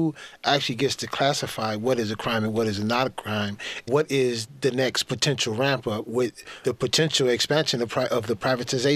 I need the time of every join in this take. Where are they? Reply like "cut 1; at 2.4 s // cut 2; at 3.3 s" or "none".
cut 1; at 3.7 s // cut 2; at 6.5 s